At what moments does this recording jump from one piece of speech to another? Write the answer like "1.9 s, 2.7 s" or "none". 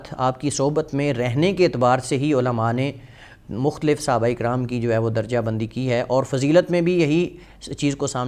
none